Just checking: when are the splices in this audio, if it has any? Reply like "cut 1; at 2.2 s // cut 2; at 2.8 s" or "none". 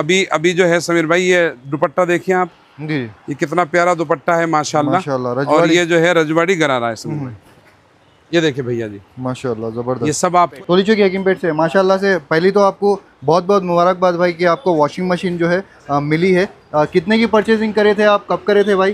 cut 1; at 10.4 s